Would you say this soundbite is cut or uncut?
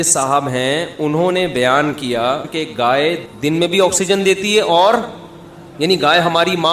cut